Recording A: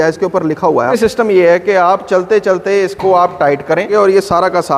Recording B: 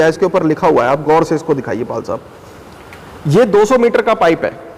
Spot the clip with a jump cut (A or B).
A